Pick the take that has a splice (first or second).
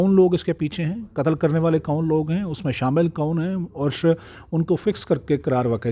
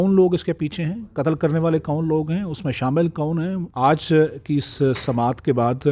second